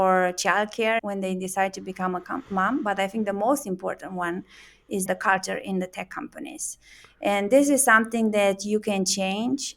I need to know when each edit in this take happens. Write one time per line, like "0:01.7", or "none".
0:01.0
0:05.1